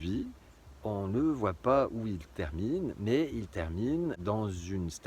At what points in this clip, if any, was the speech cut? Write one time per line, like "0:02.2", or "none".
none